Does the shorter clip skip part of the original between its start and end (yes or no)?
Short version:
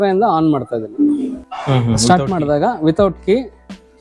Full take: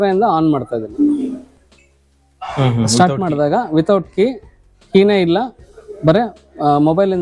yes